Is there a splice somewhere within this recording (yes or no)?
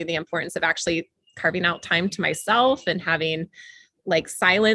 no